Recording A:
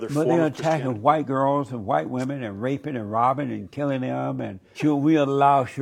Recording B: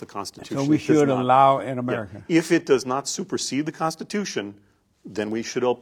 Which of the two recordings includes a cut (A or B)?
A